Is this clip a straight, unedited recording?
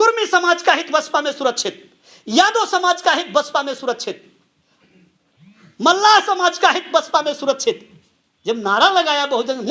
yes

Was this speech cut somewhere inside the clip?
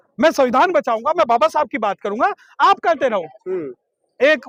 no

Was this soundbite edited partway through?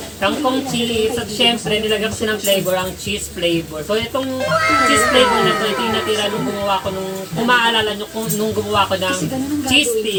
no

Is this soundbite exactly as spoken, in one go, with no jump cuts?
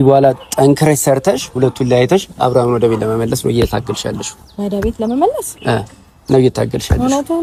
yes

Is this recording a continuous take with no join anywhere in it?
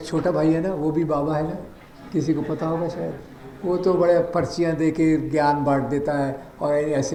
yes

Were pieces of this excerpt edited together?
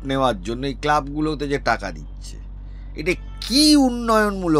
no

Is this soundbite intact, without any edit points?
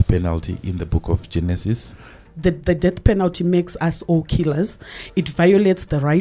no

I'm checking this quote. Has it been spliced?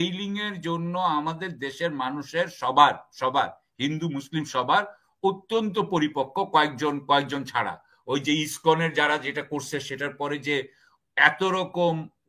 no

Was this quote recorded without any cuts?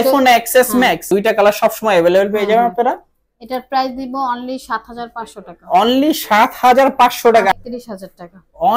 no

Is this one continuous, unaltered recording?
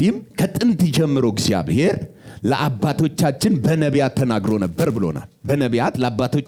yes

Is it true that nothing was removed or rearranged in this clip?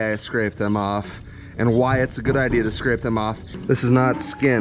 no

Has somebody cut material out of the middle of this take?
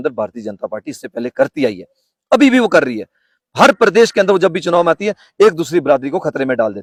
no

